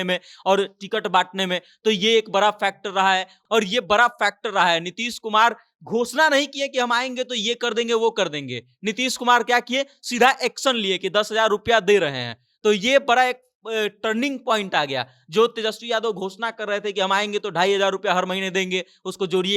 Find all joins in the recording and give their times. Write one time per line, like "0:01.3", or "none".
0:03.3